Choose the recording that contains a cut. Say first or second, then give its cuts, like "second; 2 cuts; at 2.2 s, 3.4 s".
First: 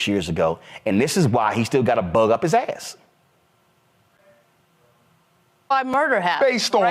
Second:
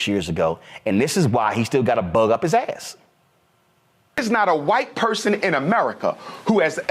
second; 1 cut; at 4.2 s